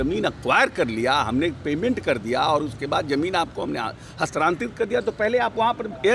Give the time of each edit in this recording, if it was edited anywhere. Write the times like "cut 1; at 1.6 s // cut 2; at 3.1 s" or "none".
none